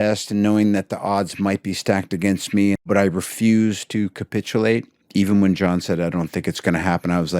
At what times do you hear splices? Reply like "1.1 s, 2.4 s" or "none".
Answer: 2.9 s